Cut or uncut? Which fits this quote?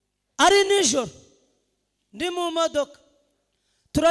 uncut